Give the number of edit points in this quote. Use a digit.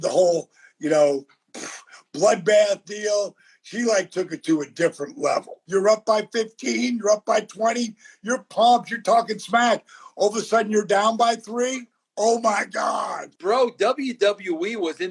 2